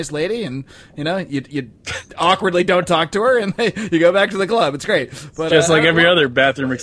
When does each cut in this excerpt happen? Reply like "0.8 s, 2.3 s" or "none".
none